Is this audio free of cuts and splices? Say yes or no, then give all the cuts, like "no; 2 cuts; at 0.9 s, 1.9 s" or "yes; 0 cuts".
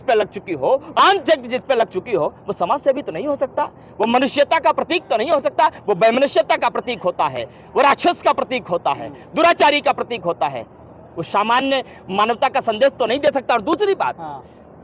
yes; 0 cuts